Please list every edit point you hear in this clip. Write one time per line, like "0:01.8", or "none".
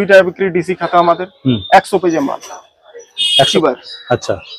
0:03.5